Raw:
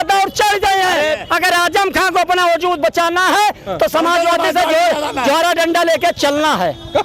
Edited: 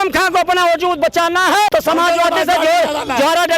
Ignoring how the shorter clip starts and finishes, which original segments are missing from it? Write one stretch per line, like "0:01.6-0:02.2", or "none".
0:03.5-0:03.8